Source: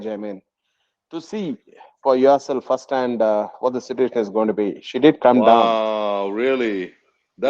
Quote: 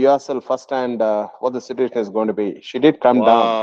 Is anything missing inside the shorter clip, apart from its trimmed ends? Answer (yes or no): no